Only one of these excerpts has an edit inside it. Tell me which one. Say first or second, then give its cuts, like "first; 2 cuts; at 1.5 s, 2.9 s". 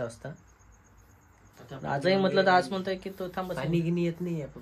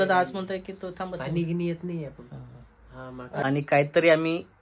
second; 1 cut; at 3.4 s